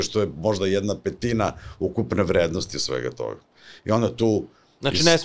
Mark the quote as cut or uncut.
uncut